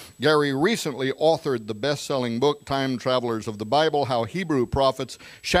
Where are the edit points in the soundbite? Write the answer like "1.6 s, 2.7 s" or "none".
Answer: 3.6 s